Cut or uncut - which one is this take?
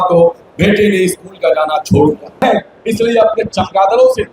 cut